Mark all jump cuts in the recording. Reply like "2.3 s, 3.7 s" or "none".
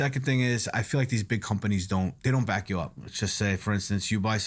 2.2 s, 3.0 s